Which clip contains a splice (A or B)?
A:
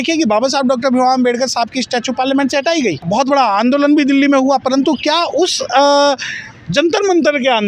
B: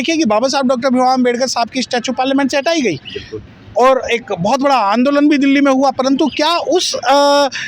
A